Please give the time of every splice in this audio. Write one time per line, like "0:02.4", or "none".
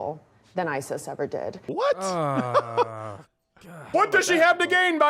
0:01.6
0:03.9